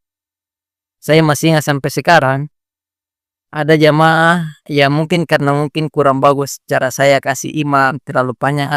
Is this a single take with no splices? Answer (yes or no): yes